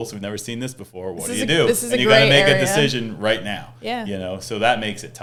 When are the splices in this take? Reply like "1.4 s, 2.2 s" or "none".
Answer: none